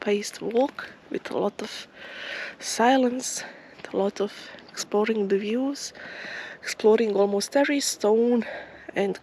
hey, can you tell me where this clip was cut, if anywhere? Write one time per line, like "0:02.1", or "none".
none